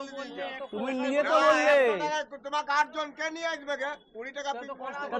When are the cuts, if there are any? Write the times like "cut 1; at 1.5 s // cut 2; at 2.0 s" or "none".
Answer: none